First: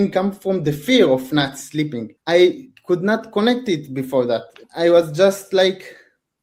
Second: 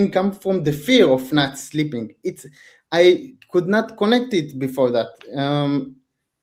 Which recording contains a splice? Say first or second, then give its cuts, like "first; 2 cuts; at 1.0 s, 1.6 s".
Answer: first; 2 cuts; at 2.1 s, 4.6 s